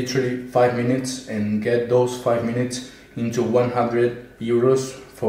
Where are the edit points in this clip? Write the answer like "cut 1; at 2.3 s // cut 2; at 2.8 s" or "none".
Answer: none